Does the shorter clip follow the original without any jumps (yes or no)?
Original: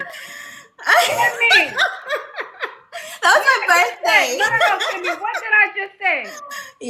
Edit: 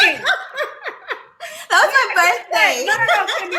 yes